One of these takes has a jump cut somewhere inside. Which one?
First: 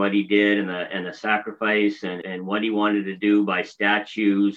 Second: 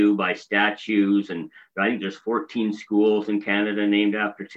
first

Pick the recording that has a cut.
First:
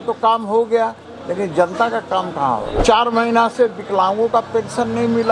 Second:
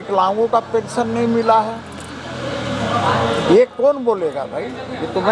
first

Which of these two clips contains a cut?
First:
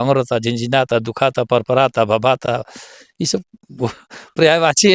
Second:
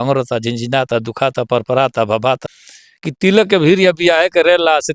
second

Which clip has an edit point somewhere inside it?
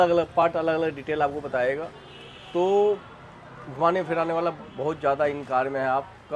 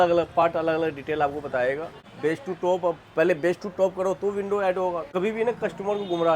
second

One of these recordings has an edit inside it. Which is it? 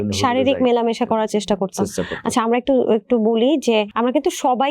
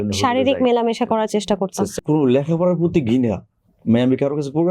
second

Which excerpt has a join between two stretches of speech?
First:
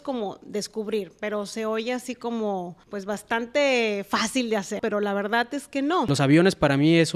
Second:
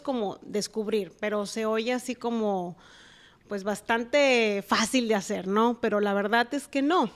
first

